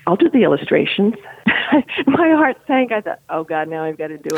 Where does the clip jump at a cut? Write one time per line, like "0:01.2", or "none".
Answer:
0:01.3